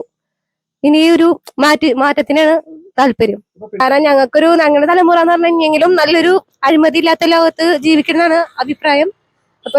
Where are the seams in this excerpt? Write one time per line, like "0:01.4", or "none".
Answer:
0:03.8